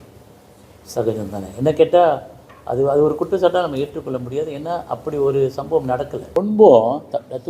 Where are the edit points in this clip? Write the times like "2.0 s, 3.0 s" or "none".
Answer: 6.2 s